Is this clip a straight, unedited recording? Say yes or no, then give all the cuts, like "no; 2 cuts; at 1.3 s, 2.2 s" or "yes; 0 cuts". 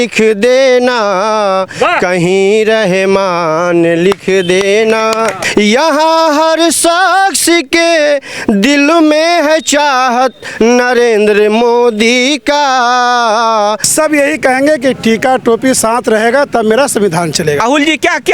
no; 3 cuts; at 5.4 s, 13.8 s, 17.6 s